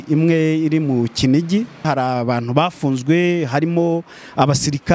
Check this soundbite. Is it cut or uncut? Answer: cut